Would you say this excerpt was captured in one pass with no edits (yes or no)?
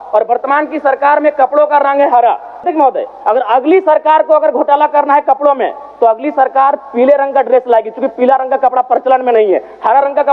no